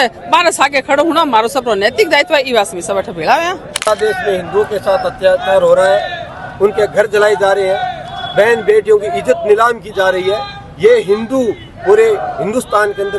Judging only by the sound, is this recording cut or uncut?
cut